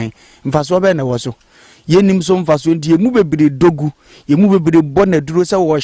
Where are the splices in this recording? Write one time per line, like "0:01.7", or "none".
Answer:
none